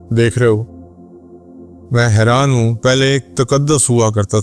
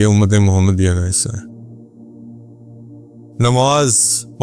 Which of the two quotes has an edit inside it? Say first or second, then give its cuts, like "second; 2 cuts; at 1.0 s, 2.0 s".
second; 2 cuts; at 1.3 s, 2.7 s